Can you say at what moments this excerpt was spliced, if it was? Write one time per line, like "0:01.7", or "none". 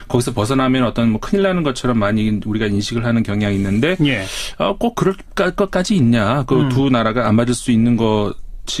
none